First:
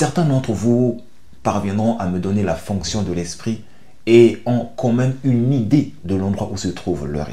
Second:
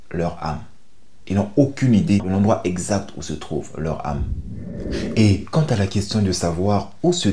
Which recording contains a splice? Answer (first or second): second